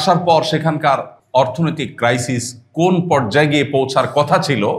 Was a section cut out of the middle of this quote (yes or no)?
yes